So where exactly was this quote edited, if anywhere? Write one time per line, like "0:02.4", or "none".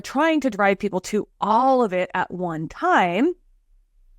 none